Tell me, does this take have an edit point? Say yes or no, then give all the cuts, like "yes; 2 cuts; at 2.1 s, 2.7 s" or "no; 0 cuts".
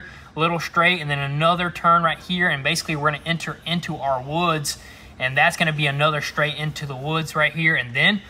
no; 0 cuts